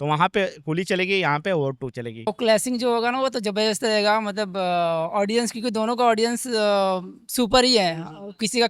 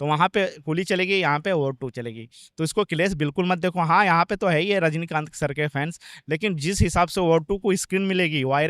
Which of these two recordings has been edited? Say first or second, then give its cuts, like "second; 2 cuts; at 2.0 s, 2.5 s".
first; 1 cut; at 2.3 s